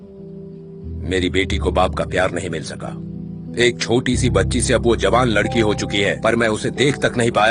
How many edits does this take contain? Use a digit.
0